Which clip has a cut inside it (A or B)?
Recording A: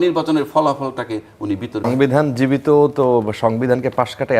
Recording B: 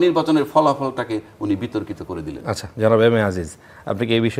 A